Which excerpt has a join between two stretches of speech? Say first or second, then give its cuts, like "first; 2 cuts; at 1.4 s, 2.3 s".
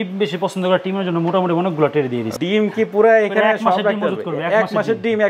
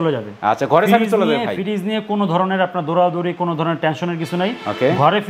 first; 1 cut; at 2.3 s